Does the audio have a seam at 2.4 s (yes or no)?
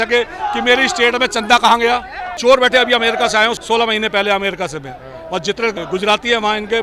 yes